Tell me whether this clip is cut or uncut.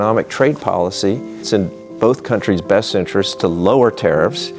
cut